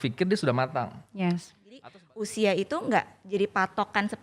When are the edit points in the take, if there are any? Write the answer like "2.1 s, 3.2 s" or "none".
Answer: 1.8 s